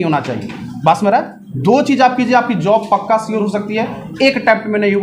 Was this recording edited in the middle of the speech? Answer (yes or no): no